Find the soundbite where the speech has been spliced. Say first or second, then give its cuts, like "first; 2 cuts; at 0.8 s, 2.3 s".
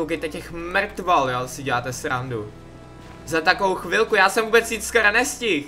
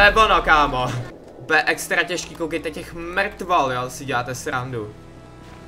second; 1 cut; at 1.1 s